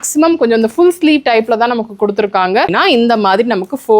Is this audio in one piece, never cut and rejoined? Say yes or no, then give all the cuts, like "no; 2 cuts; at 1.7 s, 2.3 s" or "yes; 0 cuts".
no; 1 cut; at 2.7 s